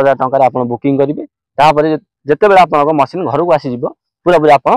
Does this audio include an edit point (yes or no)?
no